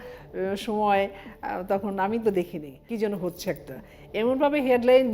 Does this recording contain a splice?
yes; 1 cut; at 2.8 s

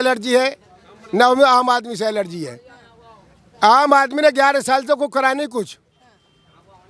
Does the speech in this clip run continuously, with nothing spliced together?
yes; 0 cuts

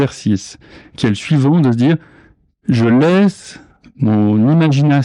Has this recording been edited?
no; 0 cuts

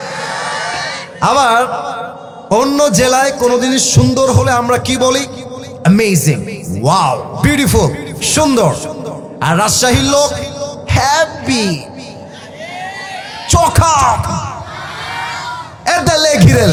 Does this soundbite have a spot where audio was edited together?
no; 0 cuts

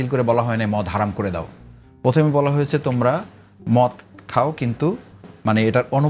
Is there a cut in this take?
no; 0 cuts

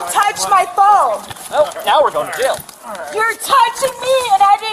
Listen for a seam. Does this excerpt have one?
no; 0 cuts

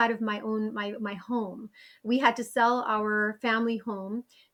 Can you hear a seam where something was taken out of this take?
no; 0 cuts

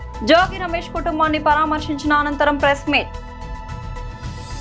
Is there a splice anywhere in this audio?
no; 0 cuts

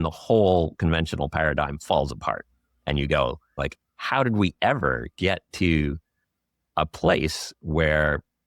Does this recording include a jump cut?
yes; 1 cut; at 3.5 s

